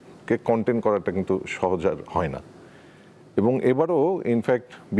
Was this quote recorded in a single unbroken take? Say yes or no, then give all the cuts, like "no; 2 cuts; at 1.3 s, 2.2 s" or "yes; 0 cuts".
yes; 0 cuts